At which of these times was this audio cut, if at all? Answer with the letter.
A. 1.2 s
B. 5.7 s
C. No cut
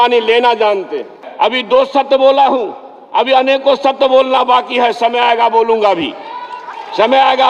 A